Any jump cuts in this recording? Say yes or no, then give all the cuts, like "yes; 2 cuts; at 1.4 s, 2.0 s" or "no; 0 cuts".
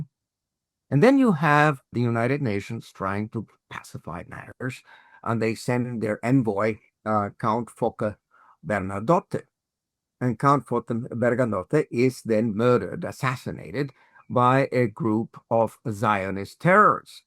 yes; 1 cut; at 1.9 s